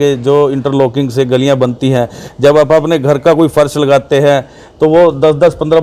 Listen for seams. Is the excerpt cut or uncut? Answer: uncut